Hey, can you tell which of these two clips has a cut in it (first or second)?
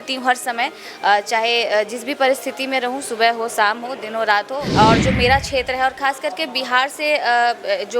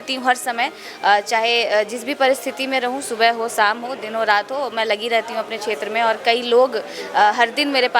first